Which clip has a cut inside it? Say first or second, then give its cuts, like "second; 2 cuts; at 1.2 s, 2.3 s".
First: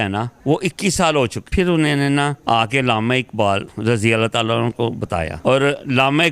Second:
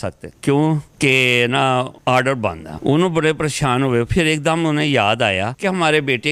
first; 4 cuts; at 1.5 s, 2.4 s, 3.7 s, 5.3 s